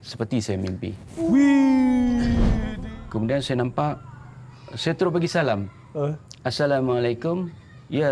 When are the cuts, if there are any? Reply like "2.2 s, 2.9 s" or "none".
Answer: 2.5 s